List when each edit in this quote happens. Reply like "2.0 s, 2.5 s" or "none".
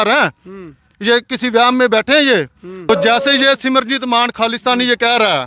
2.9 s